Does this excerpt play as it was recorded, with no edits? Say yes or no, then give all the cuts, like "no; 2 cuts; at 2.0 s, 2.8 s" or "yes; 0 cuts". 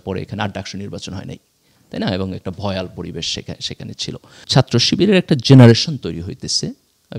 no; 1 cut; at 4.4 s